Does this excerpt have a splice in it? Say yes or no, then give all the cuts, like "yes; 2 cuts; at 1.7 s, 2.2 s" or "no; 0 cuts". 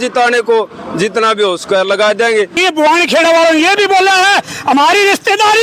yes; 1 cut; at 2.6 s